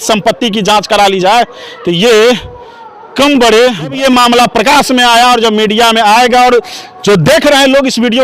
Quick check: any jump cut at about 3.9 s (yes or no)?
yes